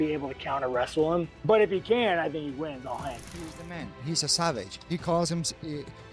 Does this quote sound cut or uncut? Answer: cut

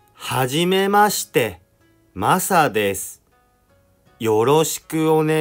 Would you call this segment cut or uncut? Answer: uncut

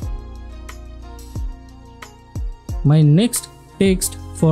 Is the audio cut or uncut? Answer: uncut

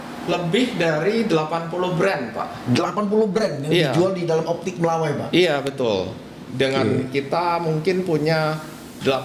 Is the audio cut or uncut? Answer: uncut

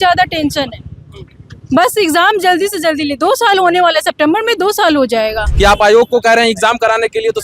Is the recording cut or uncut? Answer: cut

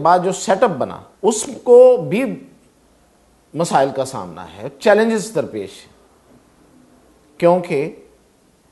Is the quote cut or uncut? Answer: cut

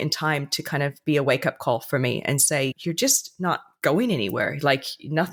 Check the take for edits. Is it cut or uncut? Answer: uncut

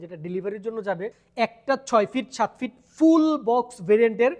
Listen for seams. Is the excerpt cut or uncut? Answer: cut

